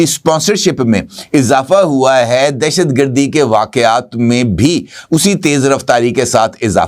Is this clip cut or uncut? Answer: uncut